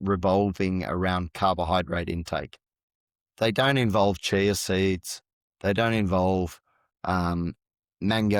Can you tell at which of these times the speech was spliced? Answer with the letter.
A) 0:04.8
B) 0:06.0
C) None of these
C